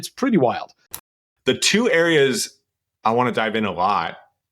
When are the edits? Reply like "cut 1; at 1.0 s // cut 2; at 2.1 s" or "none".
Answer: cut 1; at 0.9 s